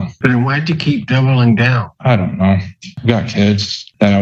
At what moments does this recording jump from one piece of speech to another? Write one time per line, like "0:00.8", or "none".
0:01.8
0:02.9

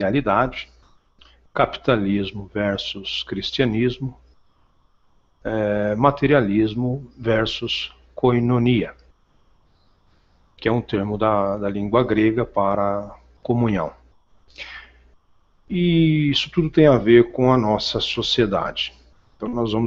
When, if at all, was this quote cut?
0:16.9

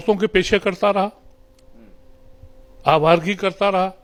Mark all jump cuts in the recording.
none

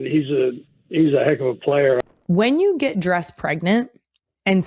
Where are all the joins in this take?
0:02.0

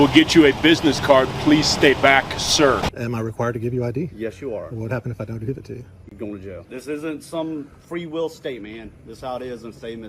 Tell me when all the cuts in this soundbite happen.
0:02.9
0:06.6

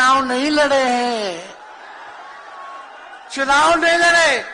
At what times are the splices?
none

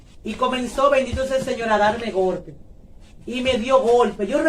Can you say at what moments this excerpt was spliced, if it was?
none

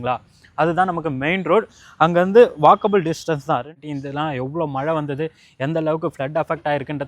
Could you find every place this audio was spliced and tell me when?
0:03.8

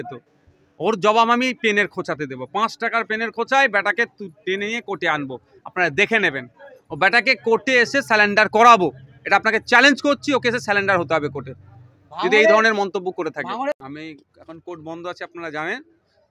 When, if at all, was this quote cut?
0:13.8

